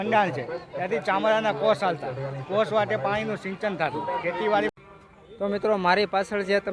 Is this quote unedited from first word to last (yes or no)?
no